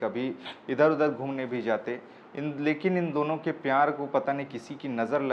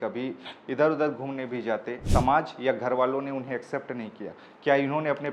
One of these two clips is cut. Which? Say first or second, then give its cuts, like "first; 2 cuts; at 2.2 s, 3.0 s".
second; 1 cut; at 2.0 s